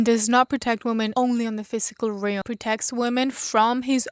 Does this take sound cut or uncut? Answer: cut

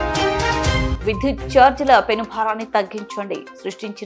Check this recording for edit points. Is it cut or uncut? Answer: cut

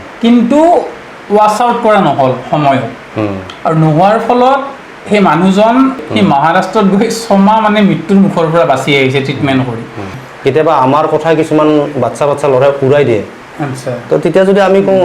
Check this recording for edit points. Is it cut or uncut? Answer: cut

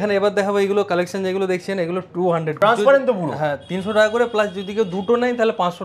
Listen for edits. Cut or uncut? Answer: cut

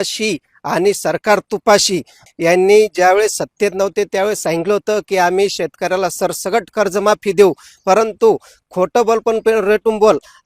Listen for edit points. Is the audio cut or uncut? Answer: cut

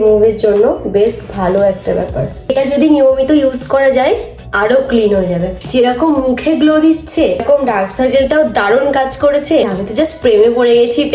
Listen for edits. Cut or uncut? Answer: cut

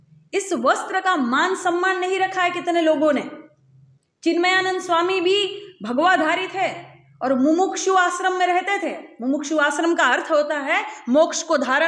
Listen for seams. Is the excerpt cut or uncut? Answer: uncut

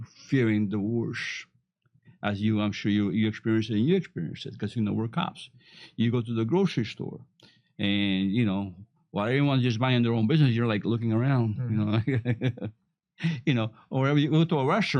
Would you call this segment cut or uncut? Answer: uncut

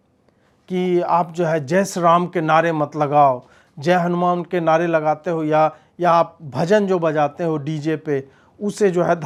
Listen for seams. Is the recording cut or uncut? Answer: uncut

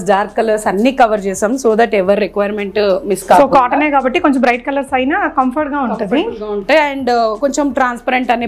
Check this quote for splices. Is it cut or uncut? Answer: uncut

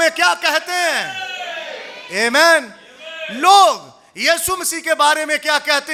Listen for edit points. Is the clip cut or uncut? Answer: uncut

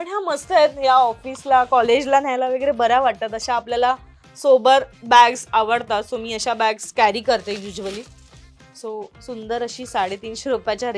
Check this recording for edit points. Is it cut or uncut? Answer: uncut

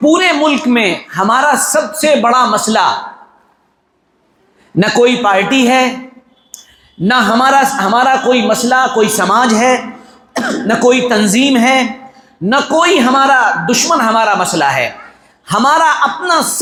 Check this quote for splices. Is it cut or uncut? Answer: uncut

